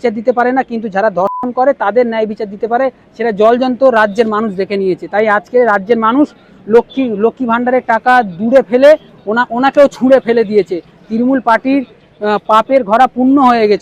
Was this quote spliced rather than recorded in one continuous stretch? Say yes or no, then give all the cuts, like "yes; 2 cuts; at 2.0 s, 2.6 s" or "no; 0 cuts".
no; 0 cuts